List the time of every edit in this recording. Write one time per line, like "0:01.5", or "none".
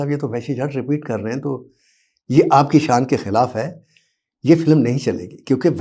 none